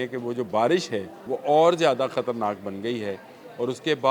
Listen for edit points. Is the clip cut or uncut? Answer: cut